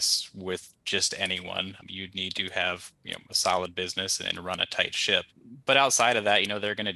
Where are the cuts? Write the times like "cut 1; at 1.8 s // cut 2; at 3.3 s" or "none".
none